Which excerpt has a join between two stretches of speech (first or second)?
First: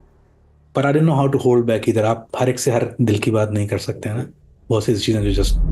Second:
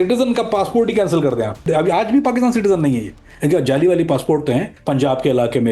second